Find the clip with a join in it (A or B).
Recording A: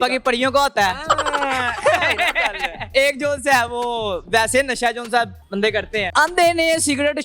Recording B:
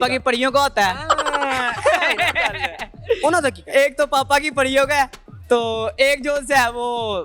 A